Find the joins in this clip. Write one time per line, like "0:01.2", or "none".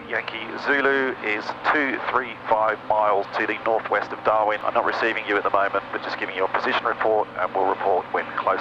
0:03.3
0:04.6